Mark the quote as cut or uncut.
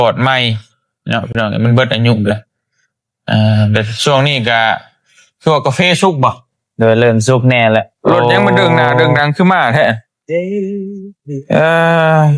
cut